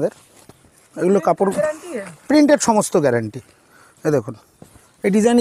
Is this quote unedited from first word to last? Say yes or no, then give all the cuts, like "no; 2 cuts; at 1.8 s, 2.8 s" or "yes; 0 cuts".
yes; 0 cuts